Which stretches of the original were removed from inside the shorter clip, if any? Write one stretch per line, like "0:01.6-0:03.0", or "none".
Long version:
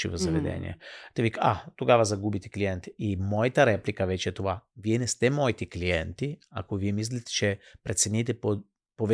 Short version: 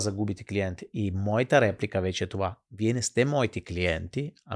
none